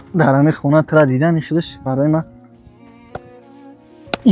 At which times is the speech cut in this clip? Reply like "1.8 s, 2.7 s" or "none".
none